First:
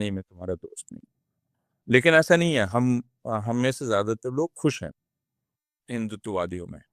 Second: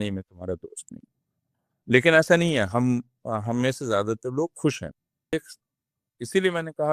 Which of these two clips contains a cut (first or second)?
second